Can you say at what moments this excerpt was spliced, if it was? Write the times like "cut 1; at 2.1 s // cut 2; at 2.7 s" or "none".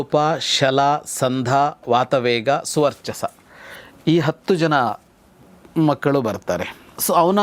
none